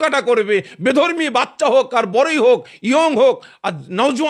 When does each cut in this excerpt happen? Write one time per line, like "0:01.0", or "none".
none